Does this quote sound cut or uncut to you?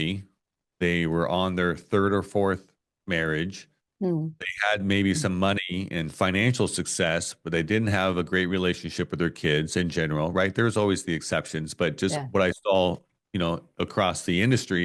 uncut